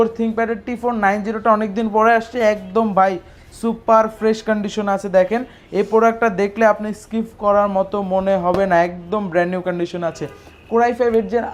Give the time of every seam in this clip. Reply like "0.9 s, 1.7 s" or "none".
none